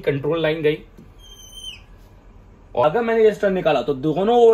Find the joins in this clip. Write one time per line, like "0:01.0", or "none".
0:02.8